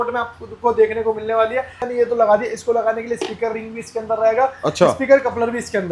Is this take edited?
yes; 1 cut; at 1.8 s

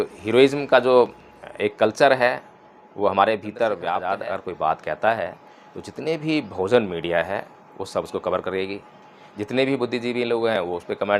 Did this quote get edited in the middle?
yes; 1 cut; at 4.0 s

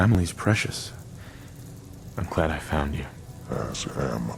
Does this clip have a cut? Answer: no; 0 cuts

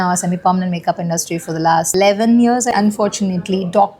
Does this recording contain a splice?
yes; 2 cuts; at 1.9 s, 2.7 s

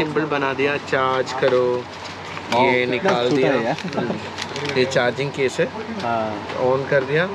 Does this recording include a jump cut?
no; 0 cuts

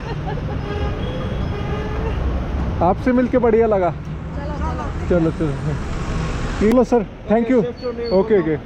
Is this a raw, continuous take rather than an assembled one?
no; 1 cut; at 6.7 s

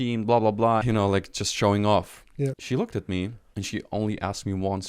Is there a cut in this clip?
yes; 3 cuts; at 0.8 s, 2.5 s, 3.4 s

